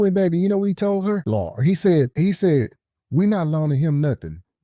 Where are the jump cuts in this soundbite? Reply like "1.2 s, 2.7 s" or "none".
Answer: 1.2 s, 2.1 s